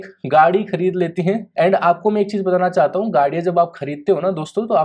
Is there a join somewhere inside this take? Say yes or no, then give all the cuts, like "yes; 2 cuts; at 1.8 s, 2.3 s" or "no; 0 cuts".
yes; 1 cut; at 1.5 s